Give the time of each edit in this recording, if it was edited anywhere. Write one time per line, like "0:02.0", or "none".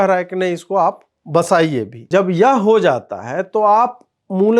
0:02.0